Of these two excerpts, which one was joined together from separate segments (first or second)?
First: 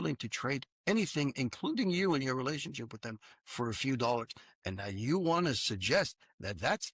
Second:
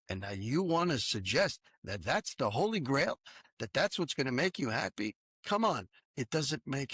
second